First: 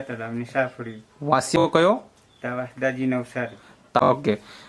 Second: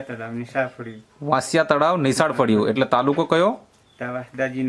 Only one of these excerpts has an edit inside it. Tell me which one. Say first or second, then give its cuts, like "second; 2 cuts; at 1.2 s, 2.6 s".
first; 2 cuts; at 1.6 s, 4.0 s